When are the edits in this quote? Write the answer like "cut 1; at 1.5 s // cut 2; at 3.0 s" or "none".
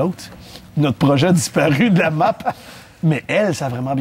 none